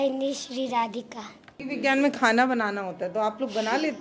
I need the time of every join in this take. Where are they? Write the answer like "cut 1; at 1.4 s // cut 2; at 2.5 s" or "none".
cut 1; at 1.7 s